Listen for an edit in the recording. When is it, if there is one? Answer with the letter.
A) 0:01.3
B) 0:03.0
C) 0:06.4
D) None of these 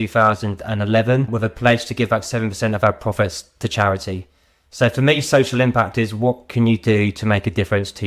A